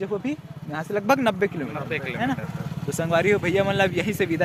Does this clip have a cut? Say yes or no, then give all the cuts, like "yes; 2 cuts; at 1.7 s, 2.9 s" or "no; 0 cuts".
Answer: no; 0 cuts